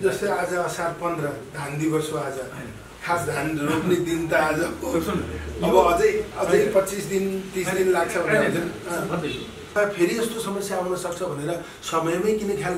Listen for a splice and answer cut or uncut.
cut